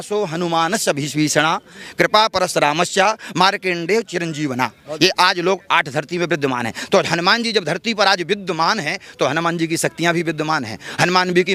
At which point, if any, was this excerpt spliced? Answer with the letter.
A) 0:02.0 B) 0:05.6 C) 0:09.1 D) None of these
D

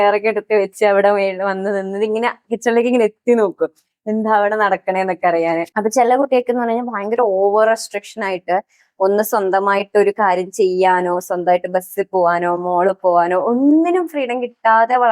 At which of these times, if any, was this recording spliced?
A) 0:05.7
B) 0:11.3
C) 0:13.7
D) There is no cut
A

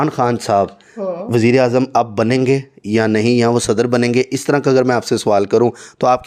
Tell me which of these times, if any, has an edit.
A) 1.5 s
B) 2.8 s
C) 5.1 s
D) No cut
D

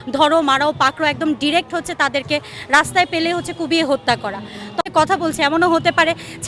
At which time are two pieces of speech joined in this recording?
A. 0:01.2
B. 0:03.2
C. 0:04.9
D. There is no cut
C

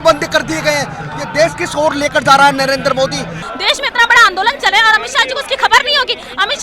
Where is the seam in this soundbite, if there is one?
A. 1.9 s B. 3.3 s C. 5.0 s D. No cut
B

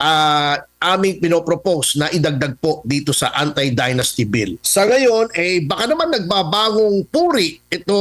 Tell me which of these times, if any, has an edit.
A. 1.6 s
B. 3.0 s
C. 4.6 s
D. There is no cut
C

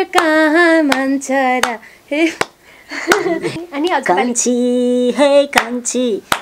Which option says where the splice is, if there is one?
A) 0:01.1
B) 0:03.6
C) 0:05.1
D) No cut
B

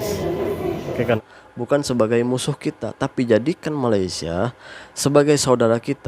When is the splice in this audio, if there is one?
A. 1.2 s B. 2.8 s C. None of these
A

